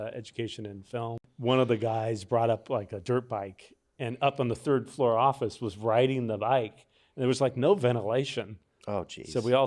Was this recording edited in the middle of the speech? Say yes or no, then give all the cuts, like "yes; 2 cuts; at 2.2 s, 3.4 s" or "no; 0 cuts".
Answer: yes; 1 cut; at 1.2 s